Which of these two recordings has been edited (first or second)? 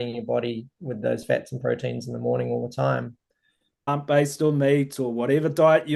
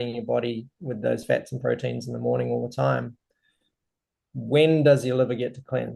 first